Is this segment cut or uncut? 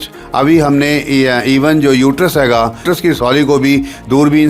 cut